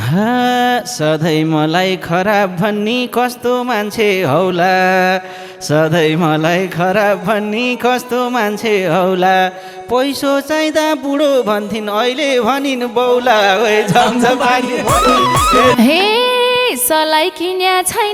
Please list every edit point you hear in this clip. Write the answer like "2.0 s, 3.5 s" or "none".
15.7 s